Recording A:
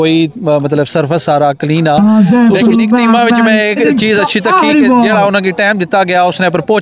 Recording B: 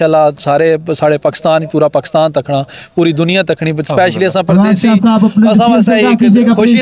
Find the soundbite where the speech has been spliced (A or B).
A